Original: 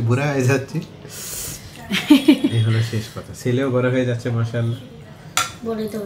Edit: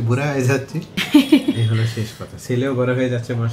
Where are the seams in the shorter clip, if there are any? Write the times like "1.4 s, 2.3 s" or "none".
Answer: 1.0 s